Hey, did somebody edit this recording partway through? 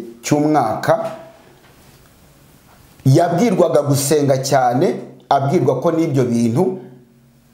no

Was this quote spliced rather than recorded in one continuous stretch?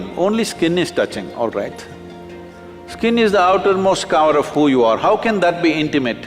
no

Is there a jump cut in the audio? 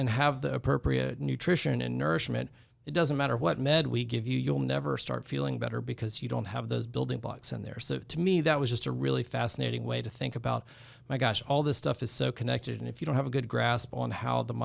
no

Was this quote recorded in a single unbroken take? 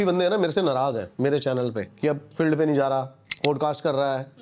no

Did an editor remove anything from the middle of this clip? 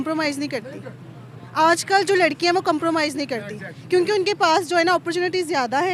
no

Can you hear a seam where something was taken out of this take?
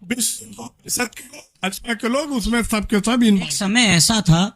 yes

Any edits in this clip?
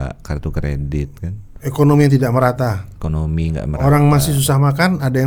no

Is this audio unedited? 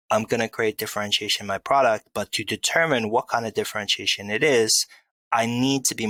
yes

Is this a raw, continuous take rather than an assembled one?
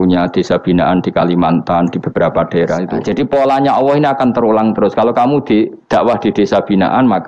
no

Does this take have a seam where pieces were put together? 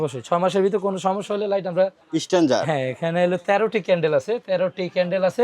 yes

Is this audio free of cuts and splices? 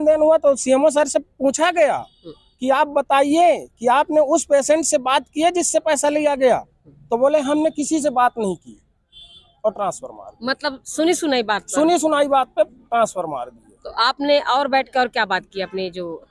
yes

